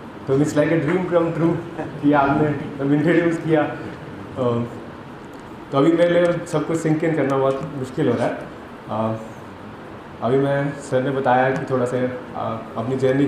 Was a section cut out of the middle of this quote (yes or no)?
no